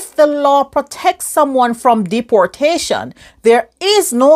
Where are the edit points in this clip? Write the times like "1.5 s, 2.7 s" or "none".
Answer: none